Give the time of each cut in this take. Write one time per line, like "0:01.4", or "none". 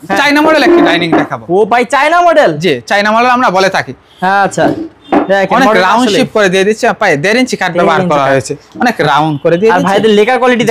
none